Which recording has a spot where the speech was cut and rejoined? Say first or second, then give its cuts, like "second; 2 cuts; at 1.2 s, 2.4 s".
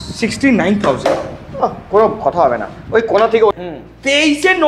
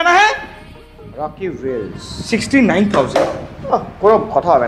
first; 1 cut; at 3.5 s